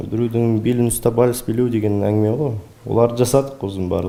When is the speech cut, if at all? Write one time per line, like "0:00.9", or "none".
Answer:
none